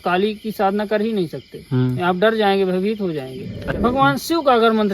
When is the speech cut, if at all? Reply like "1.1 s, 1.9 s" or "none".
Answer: 3.8 s